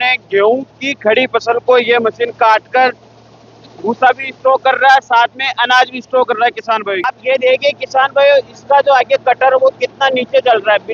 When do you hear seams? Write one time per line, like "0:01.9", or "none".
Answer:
0:07.0